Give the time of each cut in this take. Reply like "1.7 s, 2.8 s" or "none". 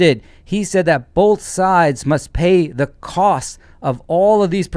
none